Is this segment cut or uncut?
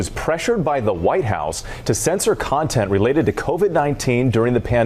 uncut